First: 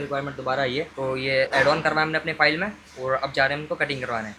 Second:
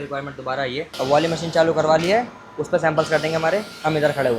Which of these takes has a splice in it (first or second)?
second